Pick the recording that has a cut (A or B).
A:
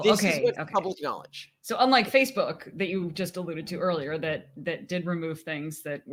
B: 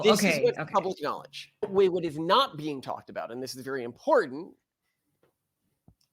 B